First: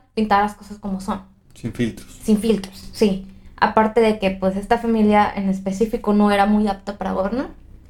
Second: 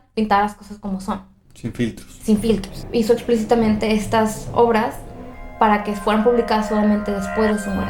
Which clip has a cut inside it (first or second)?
second